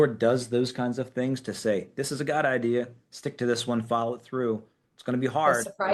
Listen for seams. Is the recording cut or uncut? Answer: uncut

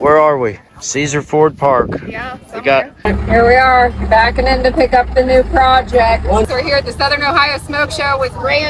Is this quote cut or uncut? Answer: cut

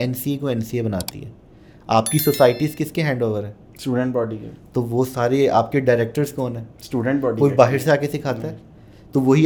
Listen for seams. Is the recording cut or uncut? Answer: uncut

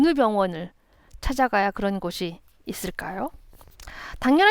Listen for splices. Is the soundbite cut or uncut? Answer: uncut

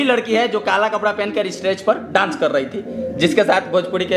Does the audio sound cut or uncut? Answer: uncut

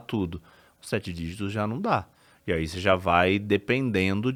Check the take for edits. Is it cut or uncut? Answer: uncut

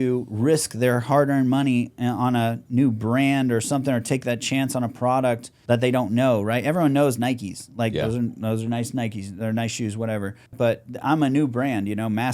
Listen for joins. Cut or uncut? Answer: cut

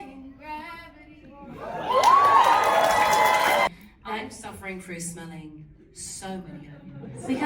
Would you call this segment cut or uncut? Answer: cut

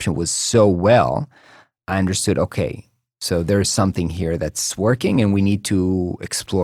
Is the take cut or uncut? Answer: uncut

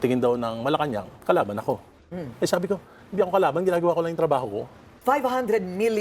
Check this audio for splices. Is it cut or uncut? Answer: cut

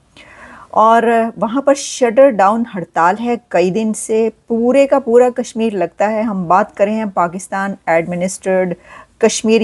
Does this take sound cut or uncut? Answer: uncut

